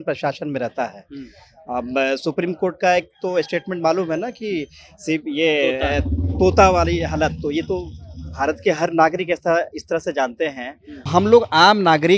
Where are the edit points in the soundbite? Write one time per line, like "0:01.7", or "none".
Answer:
0:11.1